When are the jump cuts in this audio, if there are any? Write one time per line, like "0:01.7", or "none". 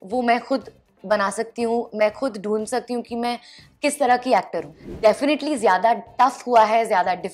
0:04.8